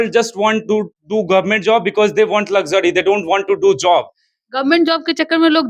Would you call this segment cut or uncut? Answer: uncut